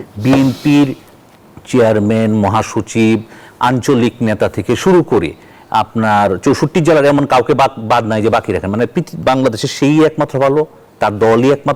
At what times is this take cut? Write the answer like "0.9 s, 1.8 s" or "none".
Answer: none